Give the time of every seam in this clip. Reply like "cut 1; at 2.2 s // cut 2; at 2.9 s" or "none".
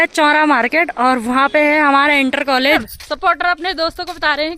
cut 1; at 2.8 s